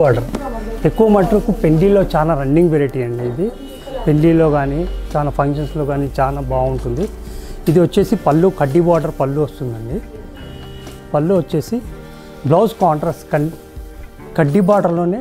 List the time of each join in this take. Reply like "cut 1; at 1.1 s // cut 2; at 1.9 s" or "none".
none